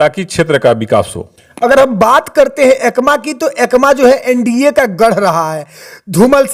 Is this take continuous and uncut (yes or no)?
yes